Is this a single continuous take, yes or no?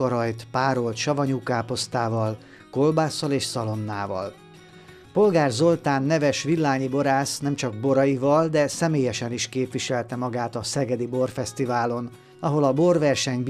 no